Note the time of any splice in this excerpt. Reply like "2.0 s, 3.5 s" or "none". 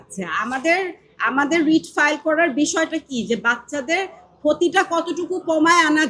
none